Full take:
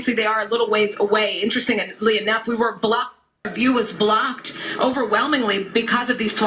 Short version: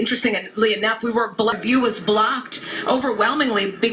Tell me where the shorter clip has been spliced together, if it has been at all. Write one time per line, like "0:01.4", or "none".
0:01.6